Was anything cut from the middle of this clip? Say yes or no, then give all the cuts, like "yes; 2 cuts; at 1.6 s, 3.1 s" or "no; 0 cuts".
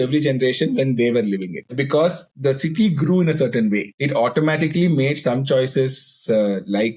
yes; 3 cuts; at 1.7 s, 2.3 s, 3.9 s